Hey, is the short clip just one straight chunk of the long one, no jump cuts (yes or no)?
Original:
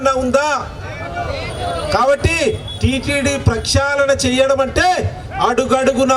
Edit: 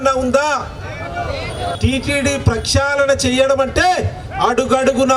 no